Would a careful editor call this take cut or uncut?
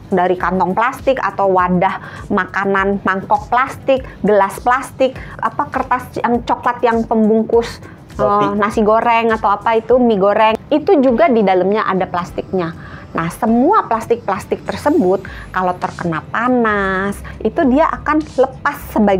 cut